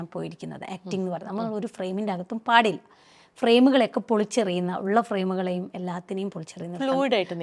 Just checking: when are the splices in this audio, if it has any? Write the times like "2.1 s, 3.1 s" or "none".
none